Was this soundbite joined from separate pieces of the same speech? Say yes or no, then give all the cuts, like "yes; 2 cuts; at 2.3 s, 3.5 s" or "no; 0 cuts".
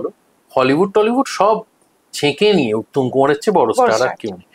no; 0 cuts